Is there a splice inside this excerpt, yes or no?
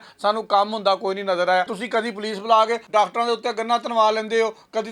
yes